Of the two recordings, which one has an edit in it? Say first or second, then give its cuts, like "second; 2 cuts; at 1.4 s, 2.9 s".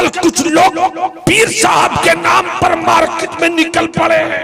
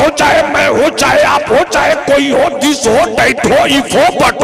first; 1 cut; at 1.2 s